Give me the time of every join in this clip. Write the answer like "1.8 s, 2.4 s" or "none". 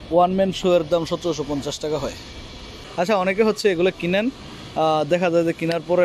2.8 s